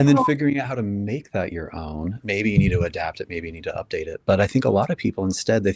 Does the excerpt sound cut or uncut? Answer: uncut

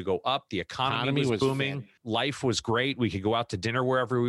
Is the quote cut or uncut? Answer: cut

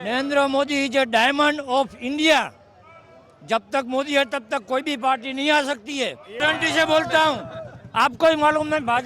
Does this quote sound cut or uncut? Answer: cut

